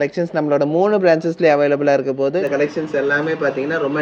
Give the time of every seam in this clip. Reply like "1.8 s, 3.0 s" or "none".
2.4 s